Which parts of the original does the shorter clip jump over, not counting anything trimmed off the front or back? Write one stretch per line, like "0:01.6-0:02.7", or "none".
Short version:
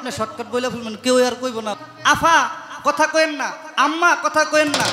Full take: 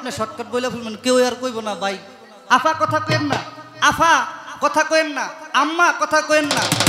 0:01.7-0:03.5